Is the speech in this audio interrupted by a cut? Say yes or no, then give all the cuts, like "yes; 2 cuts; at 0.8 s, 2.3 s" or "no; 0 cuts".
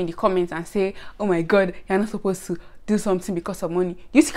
no; 0 cuts